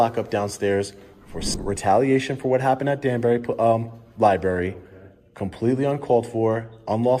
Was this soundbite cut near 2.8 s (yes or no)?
no